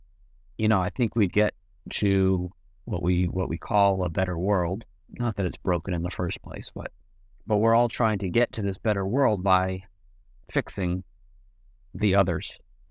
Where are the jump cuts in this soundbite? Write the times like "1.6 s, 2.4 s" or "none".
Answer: none